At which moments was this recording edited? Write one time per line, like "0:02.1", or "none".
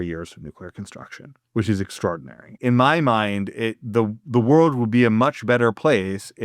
0:02.6

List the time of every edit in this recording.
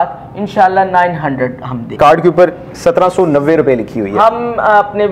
0:01.9

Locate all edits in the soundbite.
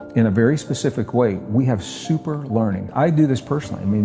0:02.9

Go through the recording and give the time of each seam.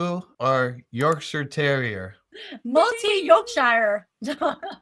none

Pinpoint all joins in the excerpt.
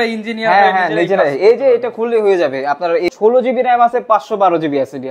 0:03.1

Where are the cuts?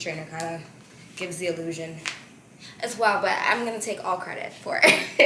none

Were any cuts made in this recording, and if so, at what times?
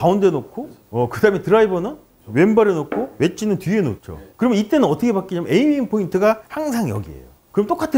none

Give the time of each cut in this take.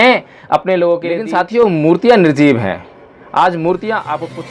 0:01.1

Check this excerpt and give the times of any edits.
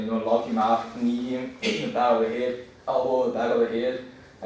none

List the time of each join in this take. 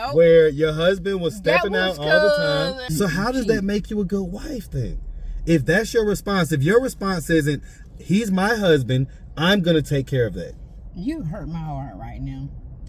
0:02.9

